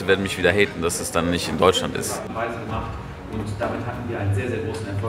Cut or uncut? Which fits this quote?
cut